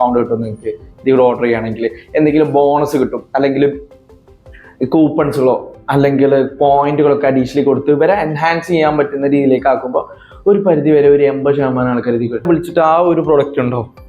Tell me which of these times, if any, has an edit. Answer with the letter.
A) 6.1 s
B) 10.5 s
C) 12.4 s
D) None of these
C